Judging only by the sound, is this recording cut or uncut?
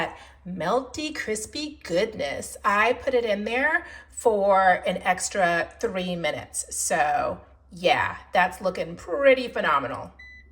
uncut